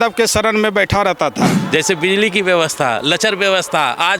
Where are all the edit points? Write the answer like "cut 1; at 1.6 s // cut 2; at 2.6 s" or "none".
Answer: cut 1; at 1.6 s